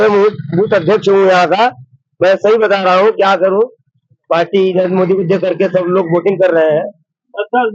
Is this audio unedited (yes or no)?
yes